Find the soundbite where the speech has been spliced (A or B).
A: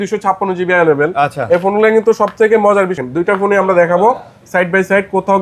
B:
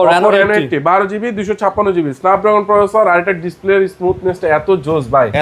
A